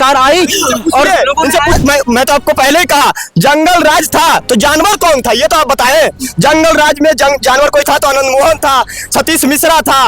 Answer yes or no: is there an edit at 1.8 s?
yes